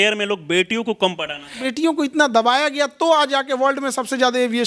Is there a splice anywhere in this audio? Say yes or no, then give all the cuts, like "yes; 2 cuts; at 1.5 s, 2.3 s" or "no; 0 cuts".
yes; 1 cut; at 1.6 s